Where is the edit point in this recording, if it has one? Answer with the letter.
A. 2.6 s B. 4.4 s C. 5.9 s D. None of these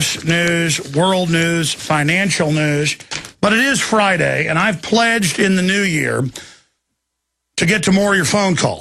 A